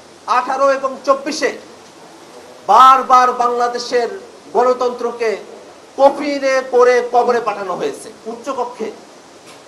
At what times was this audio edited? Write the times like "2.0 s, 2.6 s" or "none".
8.1 s